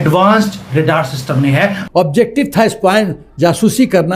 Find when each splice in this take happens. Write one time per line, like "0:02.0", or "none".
0:02.0